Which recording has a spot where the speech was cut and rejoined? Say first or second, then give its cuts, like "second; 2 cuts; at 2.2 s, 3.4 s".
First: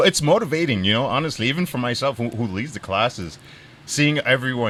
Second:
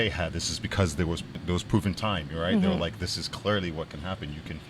second; 1 cut; at 1.4 s